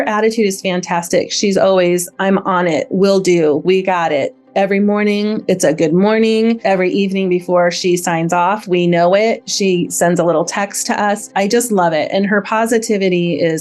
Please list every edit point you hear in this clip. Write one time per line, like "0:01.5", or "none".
0:06.6
0:11.2